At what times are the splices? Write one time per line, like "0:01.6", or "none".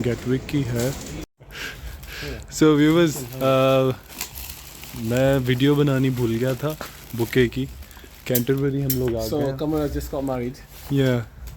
0:01.4